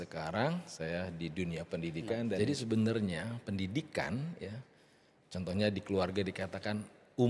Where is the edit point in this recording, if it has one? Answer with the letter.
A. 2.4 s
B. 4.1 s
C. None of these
A